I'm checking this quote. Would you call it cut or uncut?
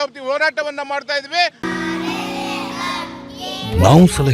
uncut